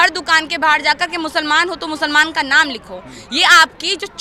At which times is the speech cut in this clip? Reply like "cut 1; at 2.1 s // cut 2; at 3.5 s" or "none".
none